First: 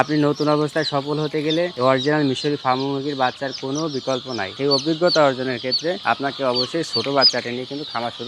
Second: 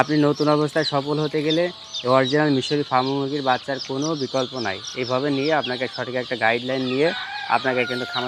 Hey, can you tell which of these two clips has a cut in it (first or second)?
first